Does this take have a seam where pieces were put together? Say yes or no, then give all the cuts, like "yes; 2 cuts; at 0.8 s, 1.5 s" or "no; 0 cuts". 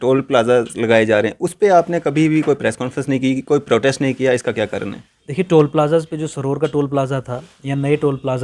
no; 0 cuts